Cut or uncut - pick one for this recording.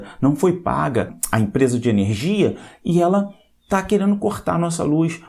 cut